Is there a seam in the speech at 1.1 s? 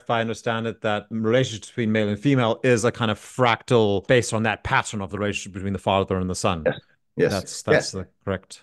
yes; 2 cuts; at 1.1 s, 4.0 s

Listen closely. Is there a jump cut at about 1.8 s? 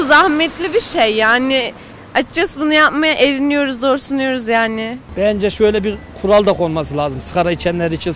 no; 1 cut; at 5.0 s

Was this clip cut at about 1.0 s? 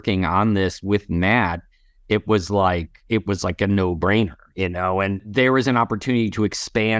no; 1 cut; at 5.2 s

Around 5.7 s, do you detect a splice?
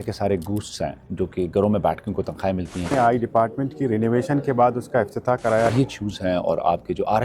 yes; 2 cuts; at 2.9 s, 5.7 s

